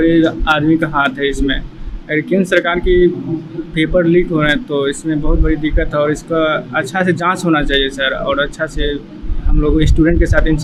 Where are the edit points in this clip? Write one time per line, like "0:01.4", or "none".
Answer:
none